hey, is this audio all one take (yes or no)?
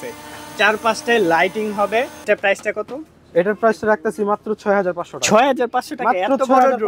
no